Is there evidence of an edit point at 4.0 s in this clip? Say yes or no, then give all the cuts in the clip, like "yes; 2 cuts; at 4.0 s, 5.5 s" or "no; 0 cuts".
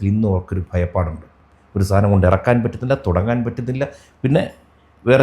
no; 0 cuts